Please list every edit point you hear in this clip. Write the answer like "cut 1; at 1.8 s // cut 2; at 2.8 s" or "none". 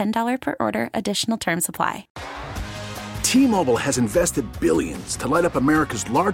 cut 1; at 2.1 s